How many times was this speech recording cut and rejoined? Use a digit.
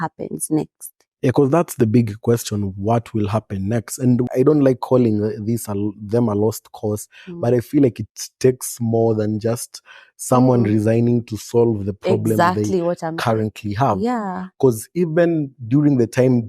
1